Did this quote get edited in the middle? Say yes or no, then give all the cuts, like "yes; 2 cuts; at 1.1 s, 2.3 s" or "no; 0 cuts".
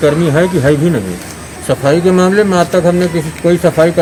no; 0 cuts